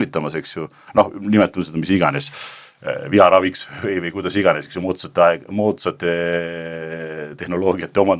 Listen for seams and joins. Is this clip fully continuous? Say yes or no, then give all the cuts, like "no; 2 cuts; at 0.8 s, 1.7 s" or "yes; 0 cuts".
yes; 0 cuts